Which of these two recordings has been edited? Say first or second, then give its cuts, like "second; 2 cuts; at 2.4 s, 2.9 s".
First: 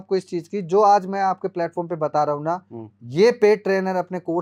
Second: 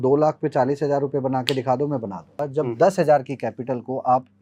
second; 1 cut; at 2.4 s